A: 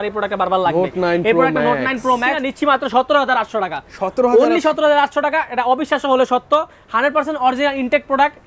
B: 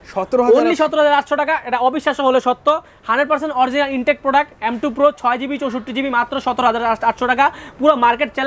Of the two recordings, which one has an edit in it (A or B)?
A